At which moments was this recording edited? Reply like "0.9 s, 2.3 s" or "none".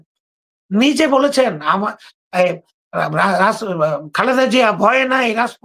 none